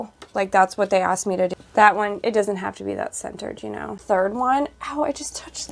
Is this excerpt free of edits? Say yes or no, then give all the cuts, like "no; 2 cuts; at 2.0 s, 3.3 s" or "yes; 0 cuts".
no; 2 cuts; at 1.5 s, 4.0 s